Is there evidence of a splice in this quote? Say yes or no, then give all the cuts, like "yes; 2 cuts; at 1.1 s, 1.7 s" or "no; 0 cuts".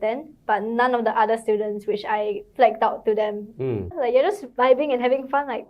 yes; 1 cut; at 3.9 s